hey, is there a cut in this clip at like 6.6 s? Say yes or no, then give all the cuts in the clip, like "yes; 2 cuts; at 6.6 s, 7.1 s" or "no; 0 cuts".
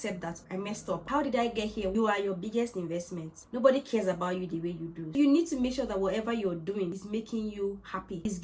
no; 2 cuts; at 1.9 s, 5.2 s